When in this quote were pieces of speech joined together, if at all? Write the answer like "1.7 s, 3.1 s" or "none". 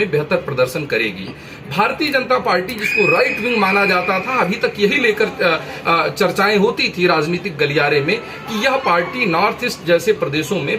none